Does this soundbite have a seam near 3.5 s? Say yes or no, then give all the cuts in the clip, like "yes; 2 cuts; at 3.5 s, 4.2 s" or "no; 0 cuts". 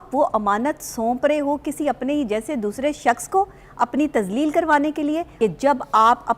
no; 1 cut; at 5.3 s